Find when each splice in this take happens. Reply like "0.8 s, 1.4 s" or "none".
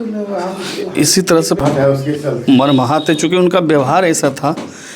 1.6 s